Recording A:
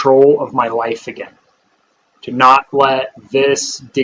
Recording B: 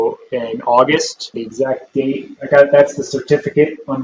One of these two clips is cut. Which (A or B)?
B